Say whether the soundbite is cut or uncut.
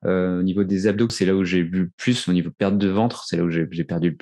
cut